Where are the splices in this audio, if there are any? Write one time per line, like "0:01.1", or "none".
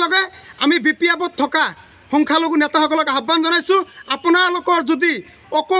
none